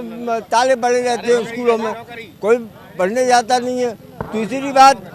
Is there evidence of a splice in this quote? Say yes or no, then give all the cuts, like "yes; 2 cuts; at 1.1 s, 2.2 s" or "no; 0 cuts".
no; 0 cuts